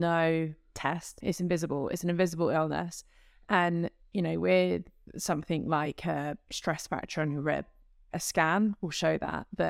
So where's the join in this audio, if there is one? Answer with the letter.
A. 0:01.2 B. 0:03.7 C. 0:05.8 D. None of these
A